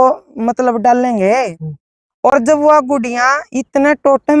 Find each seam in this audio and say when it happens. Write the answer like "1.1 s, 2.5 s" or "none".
none

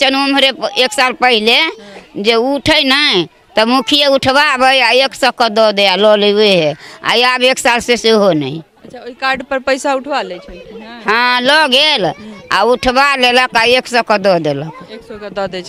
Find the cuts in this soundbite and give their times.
none

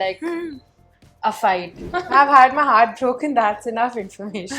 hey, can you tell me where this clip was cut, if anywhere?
1.8 s

